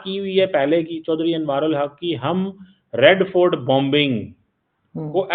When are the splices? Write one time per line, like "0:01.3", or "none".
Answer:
none